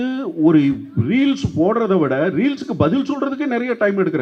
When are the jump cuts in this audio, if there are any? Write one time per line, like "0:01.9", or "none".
none